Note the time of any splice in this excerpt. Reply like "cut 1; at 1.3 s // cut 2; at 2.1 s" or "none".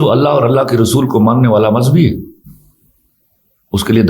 none